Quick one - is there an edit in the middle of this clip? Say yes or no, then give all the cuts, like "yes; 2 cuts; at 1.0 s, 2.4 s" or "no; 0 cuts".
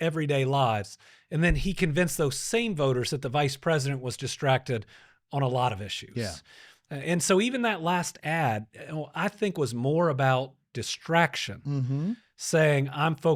no; 0 cuts